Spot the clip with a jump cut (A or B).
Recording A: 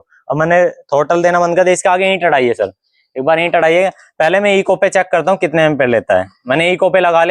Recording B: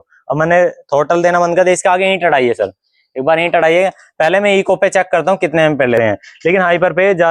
B